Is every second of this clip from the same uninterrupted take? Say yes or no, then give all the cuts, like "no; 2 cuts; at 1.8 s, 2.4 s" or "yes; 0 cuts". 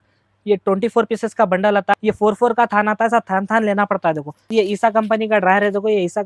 no; 2 cuts; at 1.9 s, 4.5 s